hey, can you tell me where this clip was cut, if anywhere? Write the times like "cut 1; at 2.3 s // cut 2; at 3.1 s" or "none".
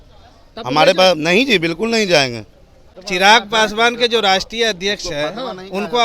cut 1; at 2.9 s

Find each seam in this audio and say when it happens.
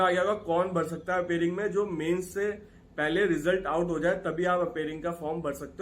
none

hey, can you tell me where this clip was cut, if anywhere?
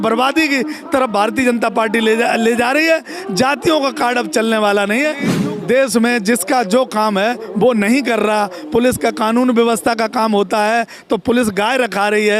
cut 1; at 5.3 s

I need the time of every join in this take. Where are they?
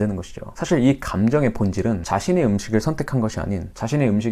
cut 1; at 2.0 s

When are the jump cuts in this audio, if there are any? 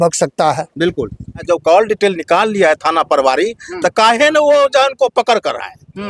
cut 1; at 1.4 s

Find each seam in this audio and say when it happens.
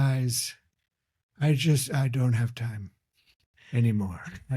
none

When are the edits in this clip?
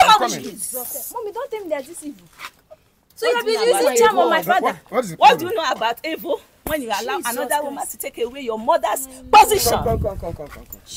none

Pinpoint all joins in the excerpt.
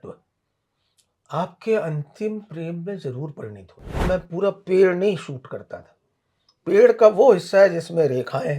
cut 1; at 4.1 s

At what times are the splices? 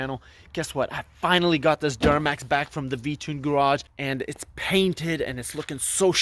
cut 1; at 3.9 s

